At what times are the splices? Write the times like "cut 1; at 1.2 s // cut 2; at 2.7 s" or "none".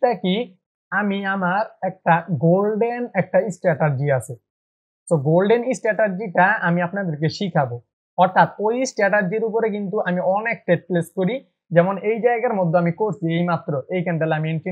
none